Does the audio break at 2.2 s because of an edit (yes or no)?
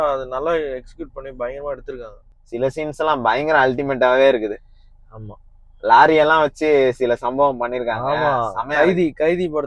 yes